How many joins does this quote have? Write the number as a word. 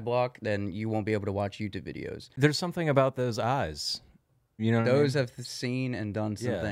one